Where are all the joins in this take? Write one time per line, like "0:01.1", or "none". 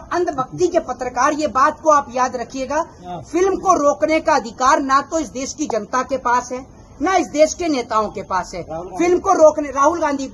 none